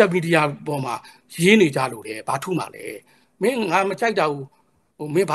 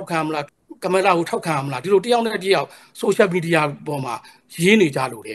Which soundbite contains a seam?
first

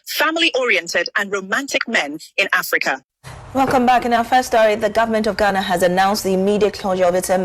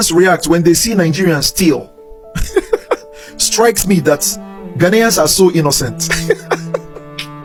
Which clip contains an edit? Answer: first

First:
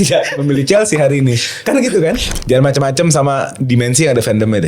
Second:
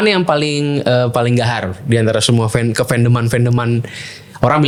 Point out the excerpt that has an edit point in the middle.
first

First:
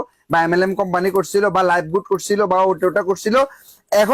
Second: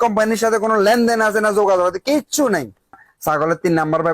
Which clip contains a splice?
second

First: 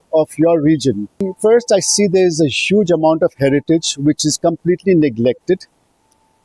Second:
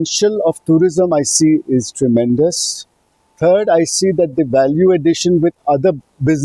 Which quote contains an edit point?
first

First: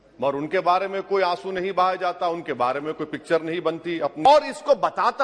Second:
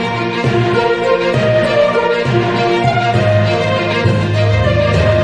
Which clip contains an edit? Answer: first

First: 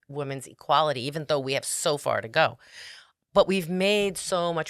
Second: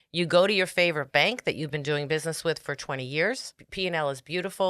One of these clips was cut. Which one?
second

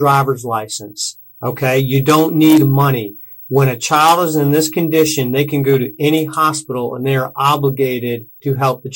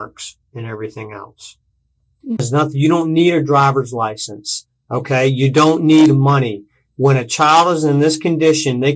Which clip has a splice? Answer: second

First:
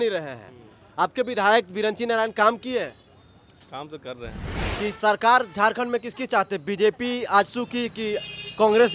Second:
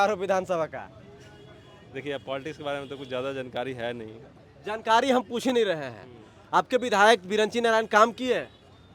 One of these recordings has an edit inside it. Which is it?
first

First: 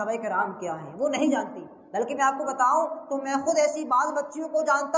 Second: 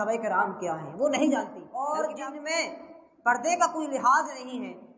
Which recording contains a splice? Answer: second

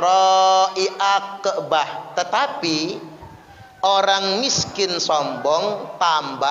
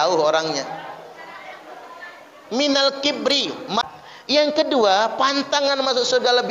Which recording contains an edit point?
second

